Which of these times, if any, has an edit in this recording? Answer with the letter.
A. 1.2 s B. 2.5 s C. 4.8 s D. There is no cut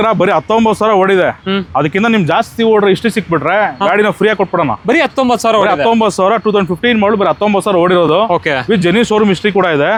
D